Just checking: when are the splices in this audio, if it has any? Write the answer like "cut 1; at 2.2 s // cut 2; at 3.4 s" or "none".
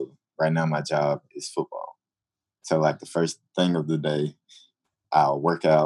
cut 1; at 3.4 s